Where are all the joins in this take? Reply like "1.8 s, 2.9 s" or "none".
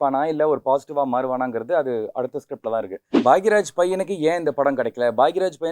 3.0 s